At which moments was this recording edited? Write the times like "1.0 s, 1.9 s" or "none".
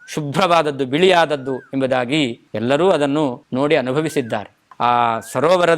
2.5 s, 3.4 s